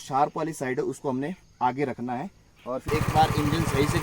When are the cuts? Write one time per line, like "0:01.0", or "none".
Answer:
0:02.8